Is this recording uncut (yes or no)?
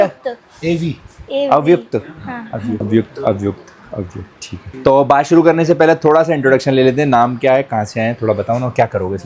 yes